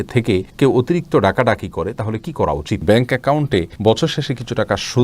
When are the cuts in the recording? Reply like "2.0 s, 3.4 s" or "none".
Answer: 2.8 s